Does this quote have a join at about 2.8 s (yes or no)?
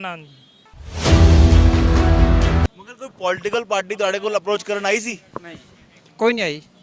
yes